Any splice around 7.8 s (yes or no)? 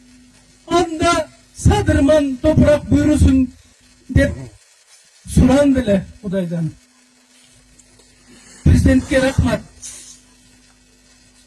yes